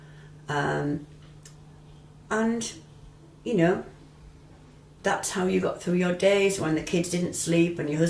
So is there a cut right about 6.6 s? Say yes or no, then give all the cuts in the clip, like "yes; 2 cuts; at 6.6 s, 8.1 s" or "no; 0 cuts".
no; 0 cuts